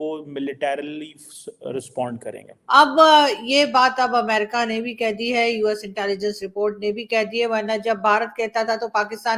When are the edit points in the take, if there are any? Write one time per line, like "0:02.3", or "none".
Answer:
0:02.5